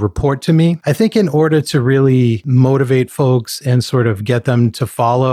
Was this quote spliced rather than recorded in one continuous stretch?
yes; 2 cuts; at 0.8 s, 2.4 s

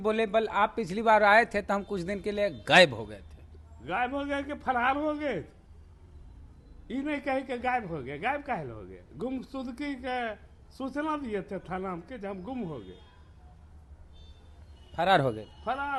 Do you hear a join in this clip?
no; 0 cuts

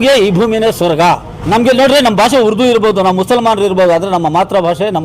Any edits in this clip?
yes; 1 cut; at 1.3 s

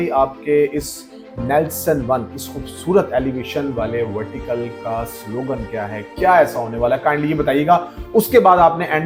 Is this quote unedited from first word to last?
yes; 0 cuts

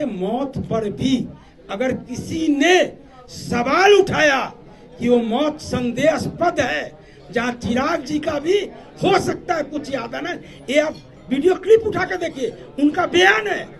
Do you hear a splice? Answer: no; 0 cuts

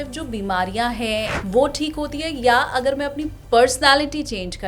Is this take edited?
yes; 1 cut; at 1.3 s

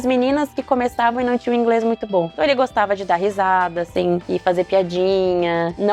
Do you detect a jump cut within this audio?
yes; 1 cut; at 4.2 s

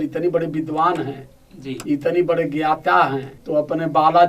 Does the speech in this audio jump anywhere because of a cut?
yes; 1 cut; at 3.3 s

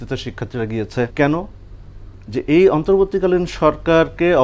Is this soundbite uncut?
no; 1 cut; at 1.1 s

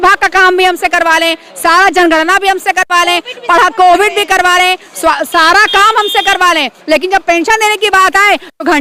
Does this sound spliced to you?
no; 0 cuts

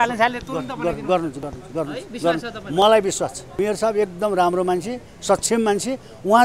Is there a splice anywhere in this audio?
yes; 1 cut; at 3.4 s

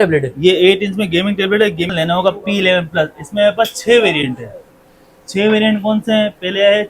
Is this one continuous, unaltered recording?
no; 1 cut; at 1.9 s

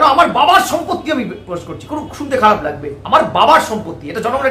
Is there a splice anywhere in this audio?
no; 0 cuts

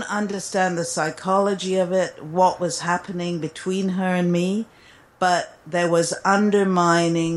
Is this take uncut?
yes; 0 cuts

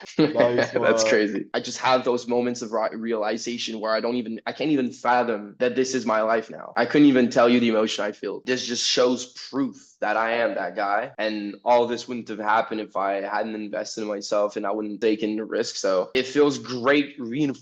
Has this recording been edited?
yes; 2 cuts; at 1.5 s, 8.4 s

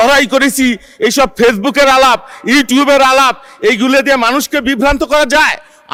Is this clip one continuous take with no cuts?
yes; 0 cuts

